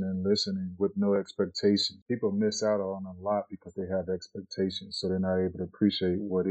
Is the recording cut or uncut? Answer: cut